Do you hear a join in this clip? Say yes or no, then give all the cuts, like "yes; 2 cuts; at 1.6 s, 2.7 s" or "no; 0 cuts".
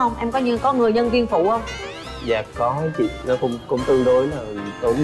no; 0 cuts